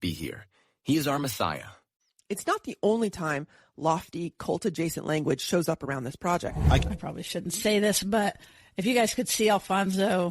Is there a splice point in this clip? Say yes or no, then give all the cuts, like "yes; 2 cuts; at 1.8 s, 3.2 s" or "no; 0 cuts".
yes; 1 cut; at 6.8 s